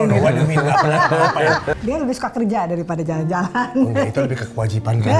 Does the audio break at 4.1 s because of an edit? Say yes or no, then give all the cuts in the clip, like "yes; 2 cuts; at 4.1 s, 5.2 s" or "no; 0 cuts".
no; 1 cut; at 1.7 s